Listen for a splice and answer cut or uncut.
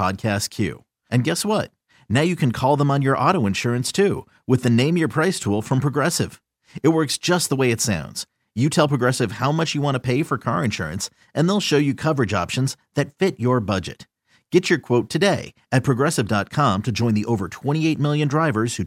uncut